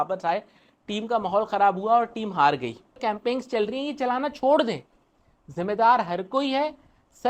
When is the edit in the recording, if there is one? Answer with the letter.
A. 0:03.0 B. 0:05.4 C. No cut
A